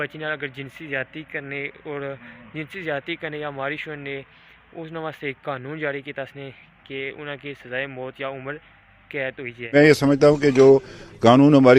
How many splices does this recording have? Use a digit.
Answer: 1